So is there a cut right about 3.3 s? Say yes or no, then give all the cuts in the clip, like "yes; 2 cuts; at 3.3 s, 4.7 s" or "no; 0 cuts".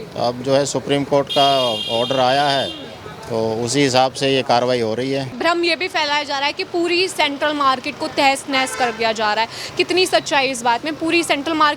no; 1 cut; at 5.3 s